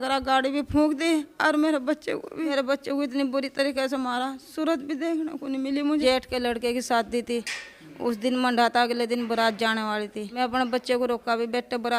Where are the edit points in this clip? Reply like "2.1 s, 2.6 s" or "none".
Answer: 2.5 s, 6.0 s, 10.3 s